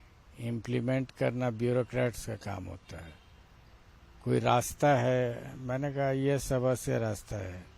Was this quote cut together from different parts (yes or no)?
no